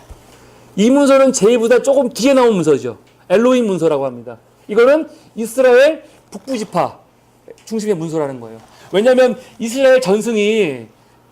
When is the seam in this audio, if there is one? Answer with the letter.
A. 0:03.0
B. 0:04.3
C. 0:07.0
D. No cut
C